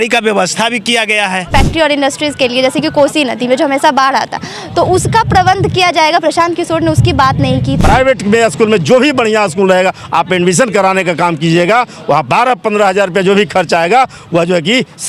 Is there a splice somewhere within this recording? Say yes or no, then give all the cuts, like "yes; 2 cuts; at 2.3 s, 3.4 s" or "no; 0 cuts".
yes; 2 cuts; at 1.4 s, 7.8 s